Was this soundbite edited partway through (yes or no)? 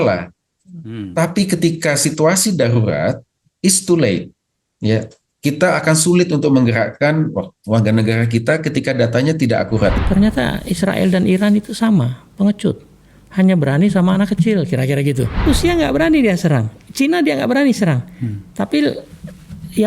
yes